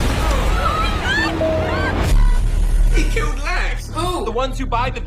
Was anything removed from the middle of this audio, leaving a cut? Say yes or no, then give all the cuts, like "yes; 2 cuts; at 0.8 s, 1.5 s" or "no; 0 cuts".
yes; 2 cuts; at 1.4 s, 2.5 s